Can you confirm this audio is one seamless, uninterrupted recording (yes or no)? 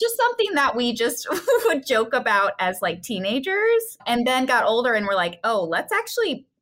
yes